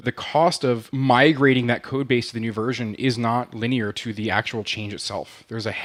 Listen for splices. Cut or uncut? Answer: uncut